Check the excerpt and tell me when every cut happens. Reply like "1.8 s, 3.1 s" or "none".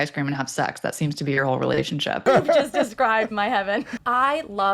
2.2 s, 4.0 s